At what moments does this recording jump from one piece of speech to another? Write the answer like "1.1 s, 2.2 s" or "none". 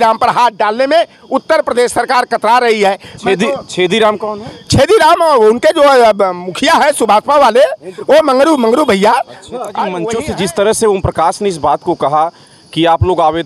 10.0 s